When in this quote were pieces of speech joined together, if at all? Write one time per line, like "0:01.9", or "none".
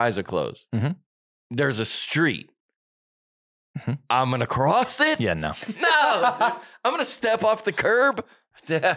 none